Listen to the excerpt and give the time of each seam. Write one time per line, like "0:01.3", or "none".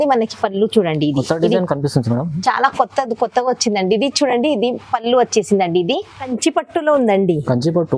0:06.3